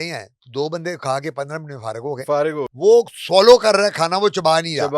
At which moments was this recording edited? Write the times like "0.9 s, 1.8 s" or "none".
2.7 s